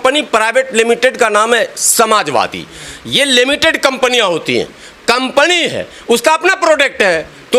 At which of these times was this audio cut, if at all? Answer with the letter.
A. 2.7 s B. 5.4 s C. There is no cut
C